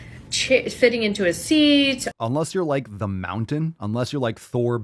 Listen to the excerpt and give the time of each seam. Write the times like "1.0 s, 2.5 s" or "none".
2.1 s, 3.8 s